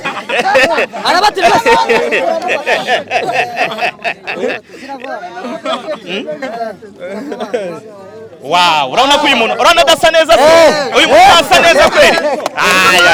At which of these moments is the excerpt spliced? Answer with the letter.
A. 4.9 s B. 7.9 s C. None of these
C